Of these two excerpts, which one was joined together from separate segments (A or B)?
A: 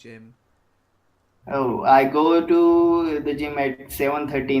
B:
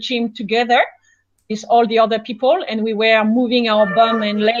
A